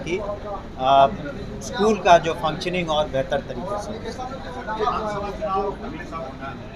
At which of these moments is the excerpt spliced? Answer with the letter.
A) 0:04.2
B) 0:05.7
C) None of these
C